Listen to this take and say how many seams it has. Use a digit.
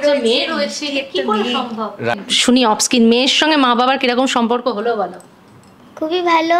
1